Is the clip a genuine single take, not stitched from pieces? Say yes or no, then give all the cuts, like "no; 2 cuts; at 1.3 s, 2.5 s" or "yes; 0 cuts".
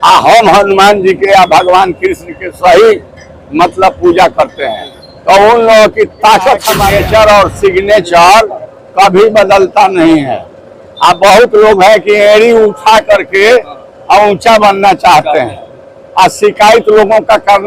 no; 1 cut; at 6.8 s